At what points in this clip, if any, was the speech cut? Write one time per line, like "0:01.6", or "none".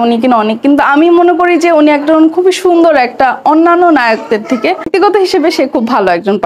0:04.9